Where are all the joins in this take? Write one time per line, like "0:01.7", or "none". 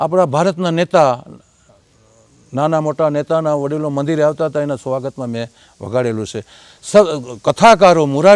none